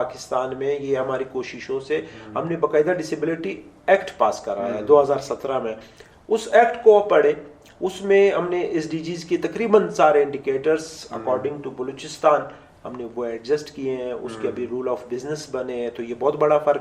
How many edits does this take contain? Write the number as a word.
zero